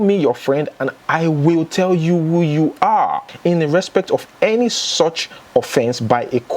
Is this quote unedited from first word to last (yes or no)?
no